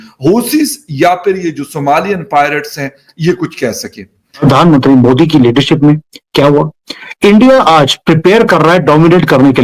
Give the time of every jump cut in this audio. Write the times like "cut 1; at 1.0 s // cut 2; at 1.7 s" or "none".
cut 1; at 4.4 s